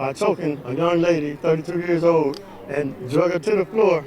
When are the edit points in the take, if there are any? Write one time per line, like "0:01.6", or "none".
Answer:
0:02.4